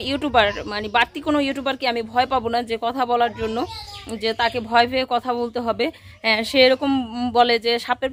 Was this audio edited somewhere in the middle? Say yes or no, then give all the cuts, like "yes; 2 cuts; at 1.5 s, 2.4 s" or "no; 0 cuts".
no; 0 cuts